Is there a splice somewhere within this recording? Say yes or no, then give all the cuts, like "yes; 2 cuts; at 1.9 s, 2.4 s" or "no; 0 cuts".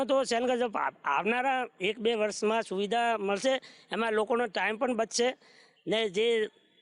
no; 0 cuts